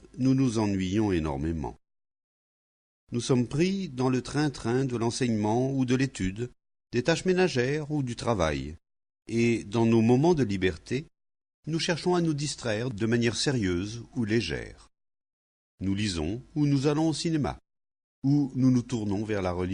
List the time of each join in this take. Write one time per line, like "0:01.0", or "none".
0:03.9